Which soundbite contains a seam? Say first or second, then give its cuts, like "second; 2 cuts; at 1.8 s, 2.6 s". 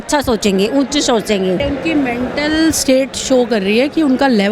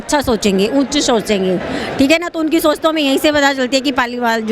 first; 1 cut; at 1.6 s